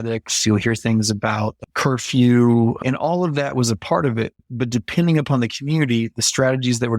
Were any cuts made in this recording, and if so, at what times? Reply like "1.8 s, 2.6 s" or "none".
2.8 s, 4.4 s